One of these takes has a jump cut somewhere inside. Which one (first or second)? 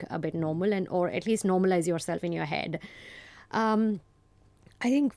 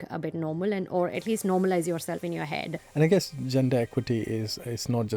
second